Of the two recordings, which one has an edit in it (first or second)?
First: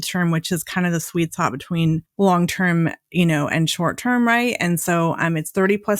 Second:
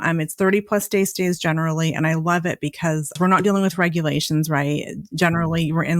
second